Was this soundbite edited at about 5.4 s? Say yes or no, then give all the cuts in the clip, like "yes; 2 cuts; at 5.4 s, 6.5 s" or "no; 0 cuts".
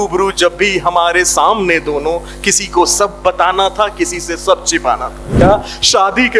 yes; 1 cut; at 5.4 s